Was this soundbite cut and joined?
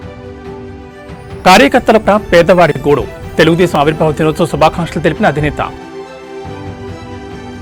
no; 0 cuts

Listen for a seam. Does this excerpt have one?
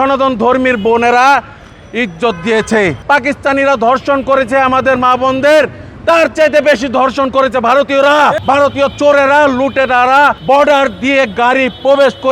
yes; 3 cuts; at 3.0 s, 8.4 s, 10.4 s

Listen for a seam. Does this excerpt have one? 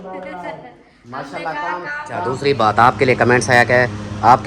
yes; 1 cut; at 2.4 s

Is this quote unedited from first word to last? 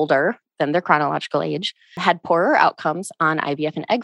no; 1 cut; at 2.0 s

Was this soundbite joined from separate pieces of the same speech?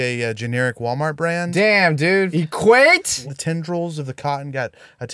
yes; 2 cuts; at 2.3 s, 3.3 s

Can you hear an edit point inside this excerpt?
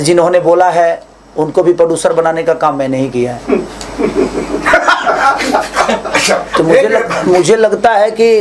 no; 0 cuts

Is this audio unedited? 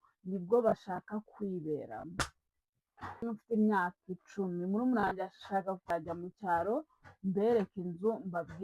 no; 2 cuts; at 3.3 s, 5.8 s

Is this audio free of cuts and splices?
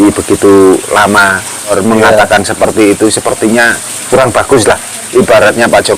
no; 1 cut; at 1.8 s

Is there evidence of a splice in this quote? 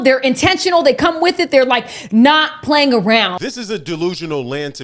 yes; 1 cut; at 3.4 s

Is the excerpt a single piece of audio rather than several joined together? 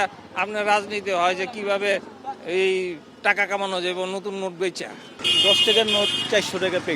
yes; 0 cuts

